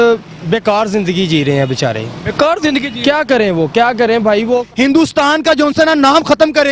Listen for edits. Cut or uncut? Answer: cut